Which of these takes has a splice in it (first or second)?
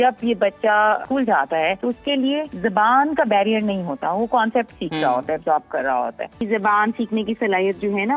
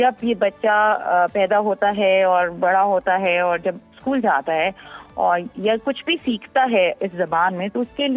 first